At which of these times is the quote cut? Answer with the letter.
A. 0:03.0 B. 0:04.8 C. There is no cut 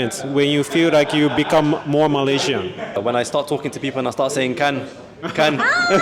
A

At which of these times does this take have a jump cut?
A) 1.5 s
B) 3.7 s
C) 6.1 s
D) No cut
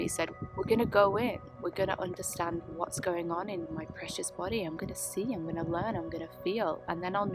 B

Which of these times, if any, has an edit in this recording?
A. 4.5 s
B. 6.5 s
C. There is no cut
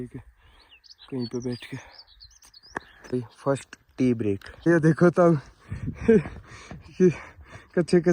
A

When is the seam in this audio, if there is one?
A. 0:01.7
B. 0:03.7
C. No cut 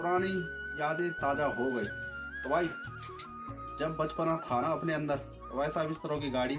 C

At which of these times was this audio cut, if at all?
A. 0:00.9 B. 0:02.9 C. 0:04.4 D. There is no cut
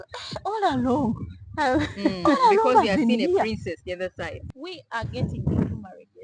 C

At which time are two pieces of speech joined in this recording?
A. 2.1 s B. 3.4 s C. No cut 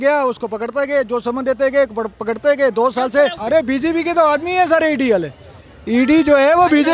B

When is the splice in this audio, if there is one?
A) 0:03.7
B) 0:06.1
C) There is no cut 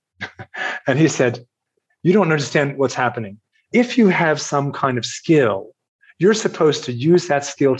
A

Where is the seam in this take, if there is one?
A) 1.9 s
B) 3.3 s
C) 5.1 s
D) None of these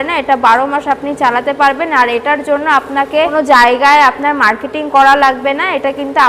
B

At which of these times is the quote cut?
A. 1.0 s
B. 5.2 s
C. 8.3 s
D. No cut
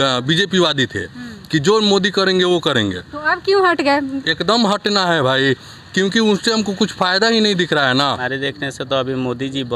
C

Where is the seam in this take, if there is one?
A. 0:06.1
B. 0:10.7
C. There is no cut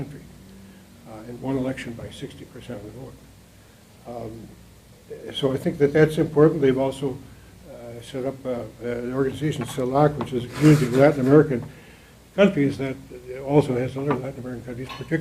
A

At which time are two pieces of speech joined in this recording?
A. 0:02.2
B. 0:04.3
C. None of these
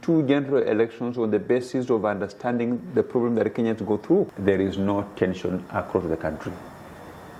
B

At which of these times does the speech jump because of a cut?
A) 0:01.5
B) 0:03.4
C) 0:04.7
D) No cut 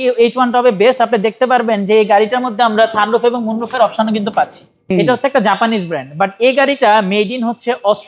C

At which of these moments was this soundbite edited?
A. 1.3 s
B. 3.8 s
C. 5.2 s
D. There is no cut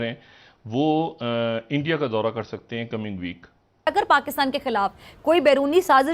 B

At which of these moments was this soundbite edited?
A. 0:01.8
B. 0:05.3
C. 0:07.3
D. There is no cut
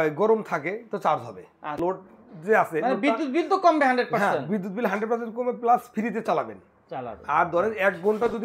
A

